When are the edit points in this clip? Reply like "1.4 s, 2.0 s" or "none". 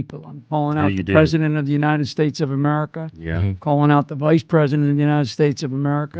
none